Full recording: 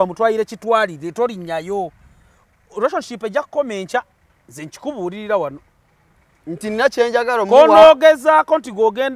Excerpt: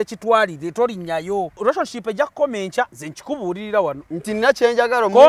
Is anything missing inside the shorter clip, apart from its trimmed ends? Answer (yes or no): yes